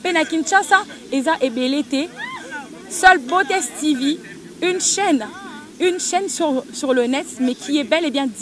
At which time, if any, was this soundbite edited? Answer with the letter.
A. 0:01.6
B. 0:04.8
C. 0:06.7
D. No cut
D